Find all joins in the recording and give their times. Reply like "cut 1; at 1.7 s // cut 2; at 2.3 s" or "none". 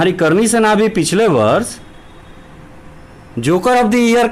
none